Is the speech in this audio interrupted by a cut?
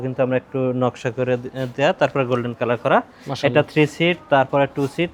no; 0 cuts

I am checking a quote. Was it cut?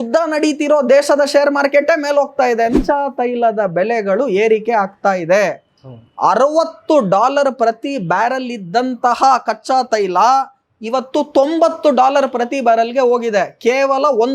yes; 1 cut; at 2.7 s

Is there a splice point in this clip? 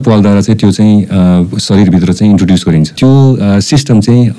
yes; 1 cut; at 2.9 s

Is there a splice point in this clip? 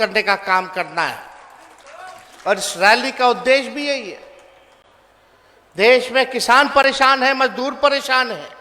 no; 0 cuts

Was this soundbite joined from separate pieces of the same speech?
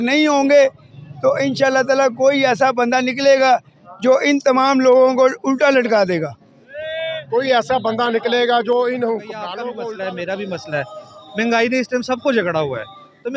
yes; 1 cut; at 9.7 s

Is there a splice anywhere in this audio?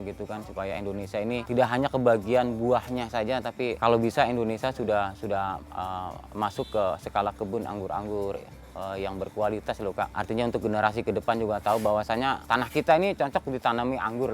yes; 4 cuts; at 1.4 s, 3.8 s, 10.2 s, 12.4 s

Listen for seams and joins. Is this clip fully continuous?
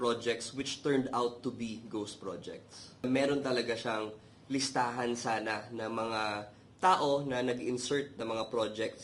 no; 1 cut; at 3.0 s

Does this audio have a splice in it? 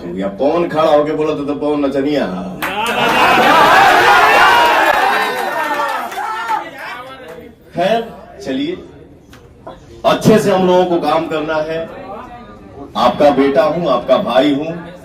no; 0 cuts

